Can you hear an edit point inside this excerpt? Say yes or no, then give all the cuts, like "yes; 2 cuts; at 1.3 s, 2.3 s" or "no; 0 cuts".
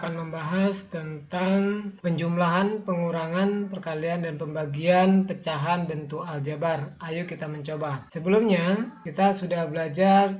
yes; 3 cuts; at 1.9 s, 8.1 s, 9.0 s